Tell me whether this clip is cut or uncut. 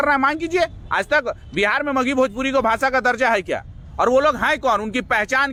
uncut